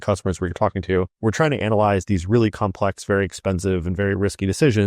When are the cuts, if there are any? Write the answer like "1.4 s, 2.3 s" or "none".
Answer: 1.1 s